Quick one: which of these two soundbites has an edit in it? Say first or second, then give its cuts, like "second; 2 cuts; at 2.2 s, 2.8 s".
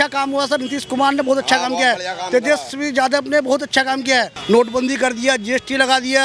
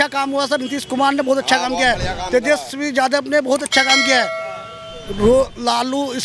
first; 1 cut; at 4.3 s